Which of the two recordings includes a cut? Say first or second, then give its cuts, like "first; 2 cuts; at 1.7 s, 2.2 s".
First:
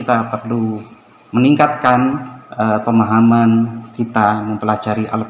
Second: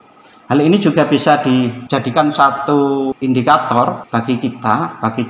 second; 3 cuts; at 1.8 s, 3.2 s, 4.0 s